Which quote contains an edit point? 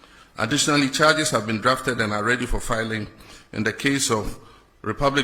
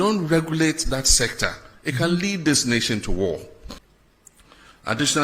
second; 1 cut; at 3.6 s

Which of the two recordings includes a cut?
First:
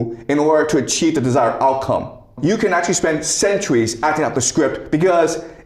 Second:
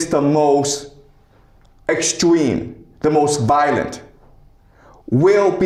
first; 1 cut; at 2.3 s

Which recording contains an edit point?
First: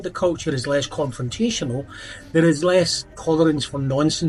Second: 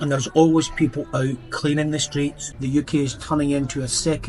second; 1 cut; at 2.5 s

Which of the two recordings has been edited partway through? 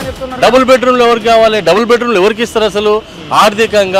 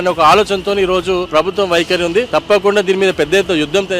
second; 2 cuts; at 1.3 s, 2.3 s

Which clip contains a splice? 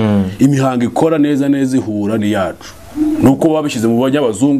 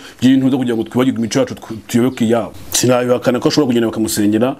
second; 1 cut; at 2.6 s

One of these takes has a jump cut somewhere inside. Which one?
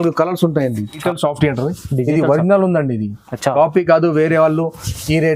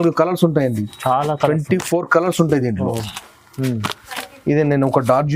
first; 1 cut; at 1.0 s

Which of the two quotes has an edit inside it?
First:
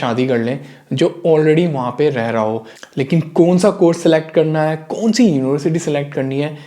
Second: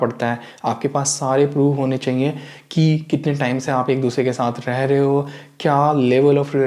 first; 1 cut; at 2.7 s

